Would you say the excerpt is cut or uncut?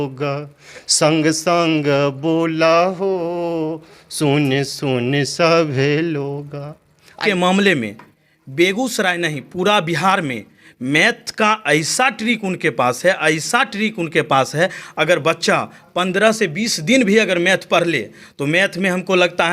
cut